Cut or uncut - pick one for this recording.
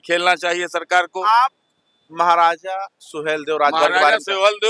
uncut